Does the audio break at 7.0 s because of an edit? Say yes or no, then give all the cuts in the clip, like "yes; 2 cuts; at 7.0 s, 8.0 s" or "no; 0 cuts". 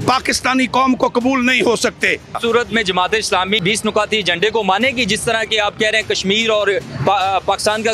no; 2 cuts; at 2.4 s, 3.6 s